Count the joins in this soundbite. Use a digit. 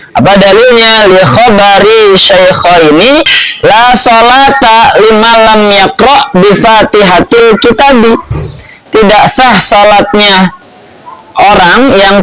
1